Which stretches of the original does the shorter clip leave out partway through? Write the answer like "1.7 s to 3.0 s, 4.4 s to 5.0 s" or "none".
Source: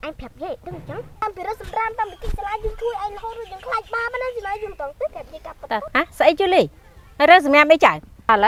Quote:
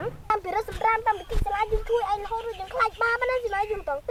none